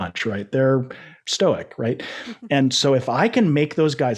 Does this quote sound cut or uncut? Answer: uncut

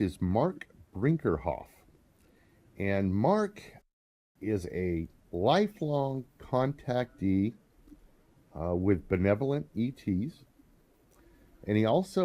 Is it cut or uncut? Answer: cut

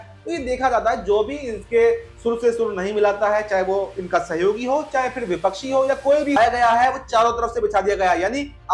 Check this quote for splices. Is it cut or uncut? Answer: cut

